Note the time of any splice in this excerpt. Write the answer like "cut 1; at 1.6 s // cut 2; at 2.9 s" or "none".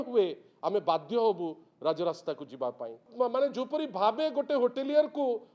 cut 1; at 3.0 s